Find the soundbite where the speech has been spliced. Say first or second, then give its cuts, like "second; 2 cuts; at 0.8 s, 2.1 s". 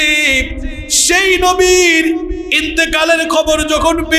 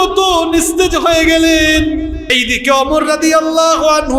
second; 1 cut; at 2.3 s